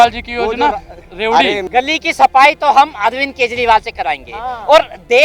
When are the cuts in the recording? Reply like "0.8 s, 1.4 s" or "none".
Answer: 1.1 s